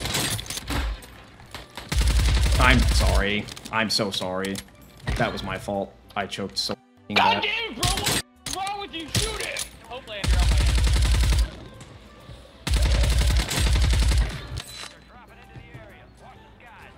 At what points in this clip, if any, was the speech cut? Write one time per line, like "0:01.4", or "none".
0:14.6